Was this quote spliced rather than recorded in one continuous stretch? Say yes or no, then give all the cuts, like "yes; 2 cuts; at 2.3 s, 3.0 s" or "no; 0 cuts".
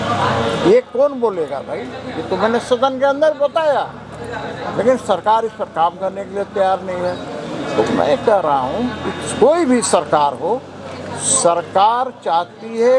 no; 0 cuts